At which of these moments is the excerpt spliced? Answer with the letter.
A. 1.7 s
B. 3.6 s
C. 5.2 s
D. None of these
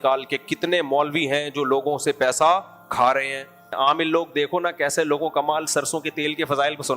B